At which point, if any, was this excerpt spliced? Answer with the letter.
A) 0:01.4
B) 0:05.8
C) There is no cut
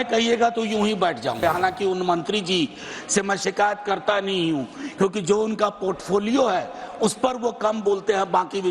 A